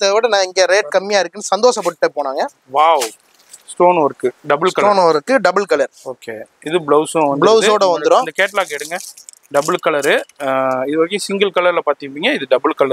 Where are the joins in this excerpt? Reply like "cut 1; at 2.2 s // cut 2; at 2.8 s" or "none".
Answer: none